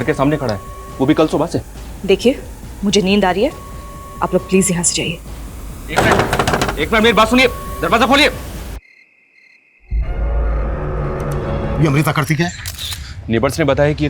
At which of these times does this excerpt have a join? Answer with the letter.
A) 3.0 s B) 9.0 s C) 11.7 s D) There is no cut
C